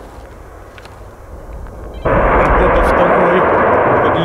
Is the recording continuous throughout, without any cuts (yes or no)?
no